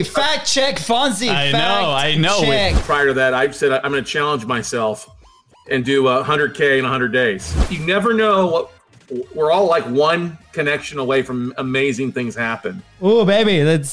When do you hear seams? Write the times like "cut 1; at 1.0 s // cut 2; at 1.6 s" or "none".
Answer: cut 1; at 2.7 s // cut 2; at 7.7 s